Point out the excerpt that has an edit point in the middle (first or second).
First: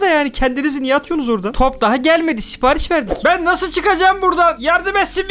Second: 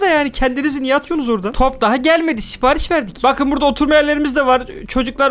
first